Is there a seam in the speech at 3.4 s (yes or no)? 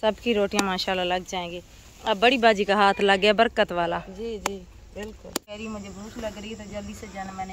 no